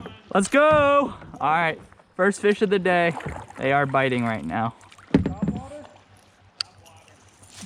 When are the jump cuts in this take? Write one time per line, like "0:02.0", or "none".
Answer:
none